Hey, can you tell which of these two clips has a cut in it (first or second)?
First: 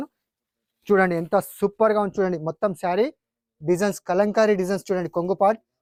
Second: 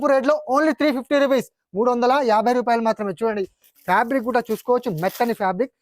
second